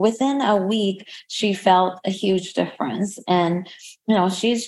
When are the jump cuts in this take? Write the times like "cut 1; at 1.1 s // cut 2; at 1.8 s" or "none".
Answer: none

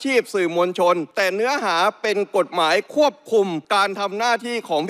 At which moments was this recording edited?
cut 1; at 1.1 s // cut 2; at 3.6 s

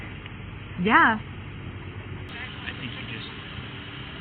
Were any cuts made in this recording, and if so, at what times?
cut 1; at 2.2 s

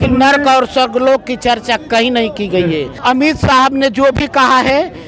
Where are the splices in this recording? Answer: cut 1; at 2.9 s

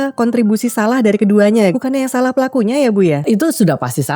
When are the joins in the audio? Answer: cut 1; at 1.7 s // cut 2; at 3.2 s

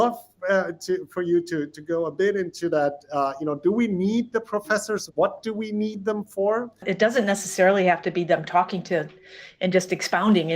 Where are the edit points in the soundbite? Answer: cut 1; at 6.8 s

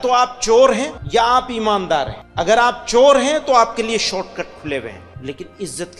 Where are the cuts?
cut 1; at 1.0 s // cut 2; at 2.2 s // cut 3; at 5.1 s

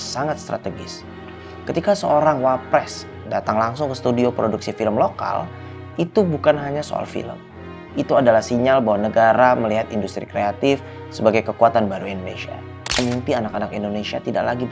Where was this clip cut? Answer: cut 1; at 13.0 s

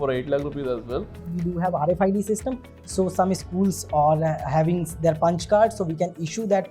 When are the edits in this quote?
cut 1; at 1.3 s

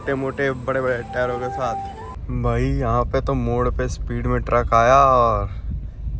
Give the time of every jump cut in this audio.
cut 1; at 2.2 s

